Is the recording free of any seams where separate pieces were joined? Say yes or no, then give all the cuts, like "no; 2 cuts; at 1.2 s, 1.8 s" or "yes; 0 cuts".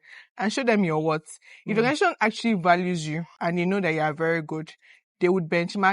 no; 1 cut; at 3.3 s